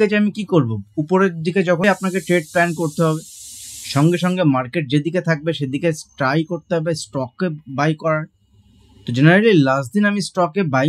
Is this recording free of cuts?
no; 1 cut; at 1.8 s

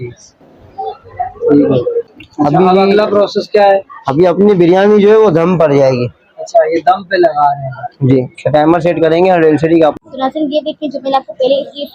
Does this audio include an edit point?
yes; 2 cuts; at 2.1 s, 10.1 s

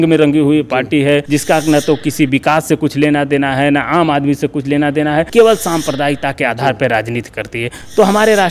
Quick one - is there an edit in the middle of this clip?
yes; 2 cuts; at 1.2 s, 5.3 s

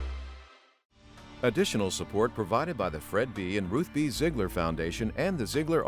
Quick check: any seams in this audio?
yes; 1 cut; at 1.2 s

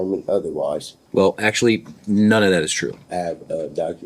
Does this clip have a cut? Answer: yes; 2 cuts; at 0.9 s, 3.0 s

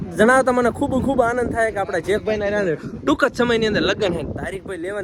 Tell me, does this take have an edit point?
no; 0 cuts

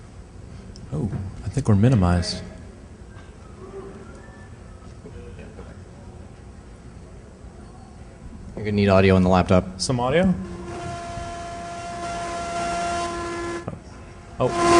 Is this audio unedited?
yes; 0 cuts

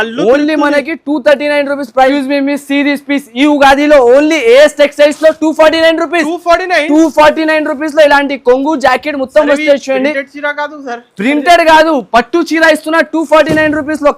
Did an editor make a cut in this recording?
yes; 1 cut; at 2.1 s

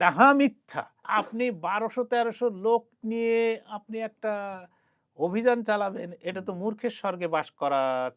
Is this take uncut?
no; 1 cut; at 1.0 s

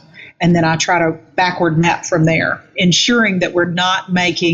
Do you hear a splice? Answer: yes; 2 cuts; at 1.2 s, 2.7 s

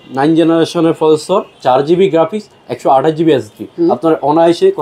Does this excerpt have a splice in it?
yes; 2 cuts; at 1.5 s, 3.7 s

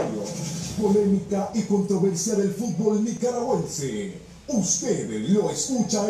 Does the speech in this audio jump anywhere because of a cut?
yes; 1 cut; at 3.2 s

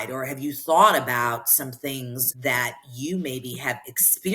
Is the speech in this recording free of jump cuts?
yes; 0 cuts

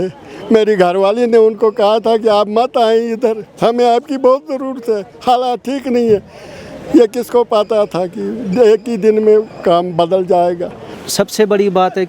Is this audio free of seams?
no; 1 cut; at 11.0 s

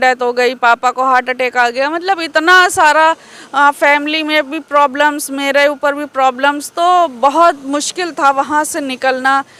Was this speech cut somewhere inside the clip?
no; 0 cuts

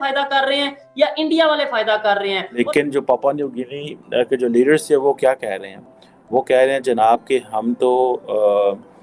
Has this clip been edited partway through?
yes; 1 cut; at 2.6 s

